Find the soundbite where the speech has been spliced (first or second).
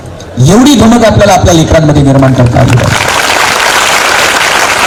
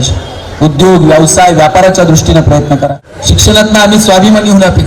second